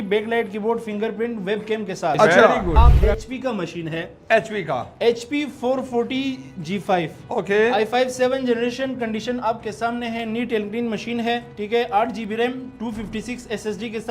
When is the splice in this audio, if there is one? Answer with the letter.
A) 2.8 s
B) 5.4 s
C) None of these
A